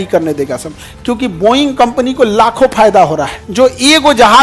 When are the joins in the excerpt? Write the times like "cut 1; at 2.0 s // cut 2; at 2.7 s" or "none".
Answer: cut 1; at 3.4 s